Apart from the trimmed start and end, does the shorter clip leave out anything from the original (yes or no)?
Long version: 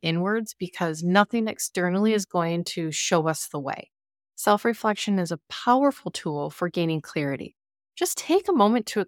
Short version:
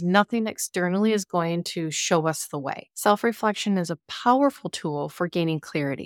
yes